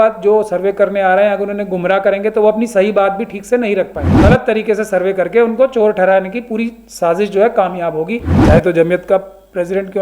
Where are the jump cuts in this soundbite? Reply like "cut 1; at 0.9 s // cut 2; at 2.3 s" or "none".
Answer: cut 1; at 4.0 s // cut 2; at 8.3 s